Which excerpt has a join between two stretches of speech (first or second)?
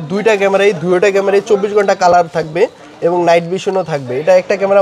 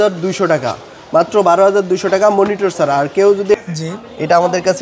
second